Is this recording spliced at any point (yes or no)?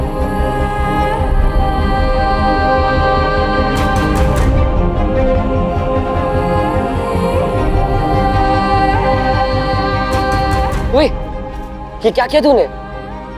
no